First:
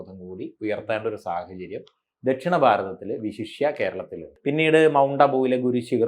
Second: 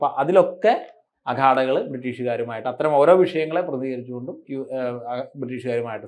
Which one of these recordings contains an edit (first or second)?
first